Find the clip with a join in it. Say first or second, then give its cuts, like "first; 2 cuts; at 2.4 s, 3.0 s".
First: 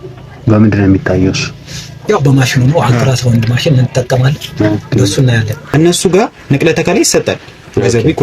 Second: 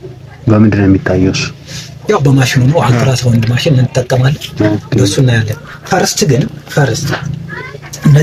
first; 1 cut; at 5.6 s